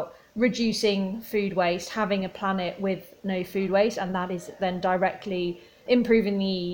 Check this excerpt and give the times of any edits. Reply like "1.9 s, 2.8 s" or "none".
5.8 s